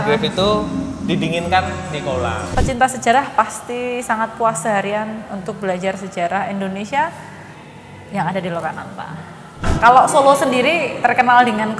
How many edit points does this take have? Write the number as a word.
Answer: two